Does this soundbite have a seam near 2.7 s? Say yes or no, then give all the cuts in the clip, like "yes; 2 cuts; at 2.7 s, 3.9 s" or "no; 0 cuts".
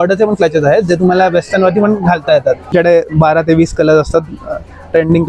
yes; 1 cut; at 2.7 s